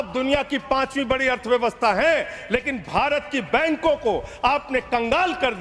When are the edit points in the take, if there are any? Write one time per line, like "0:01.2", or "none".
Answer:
none